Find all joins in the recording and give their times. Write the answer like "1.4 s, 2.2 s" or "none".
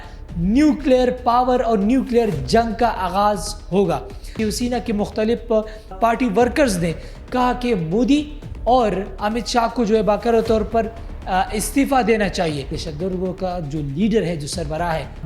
4.3 s, 5.9 s, 12.8 s